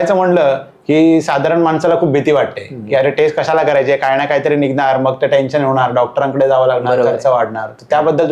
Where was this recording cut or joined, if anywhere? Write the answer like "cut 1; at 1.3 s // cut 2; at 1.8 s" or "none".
none